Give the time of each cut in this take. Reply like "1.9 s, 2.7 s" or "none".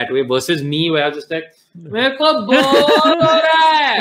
none